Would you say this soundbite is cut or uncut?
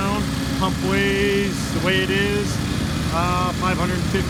uncut